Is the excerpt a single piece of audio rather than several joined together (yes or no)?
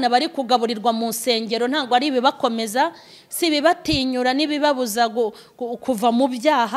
yes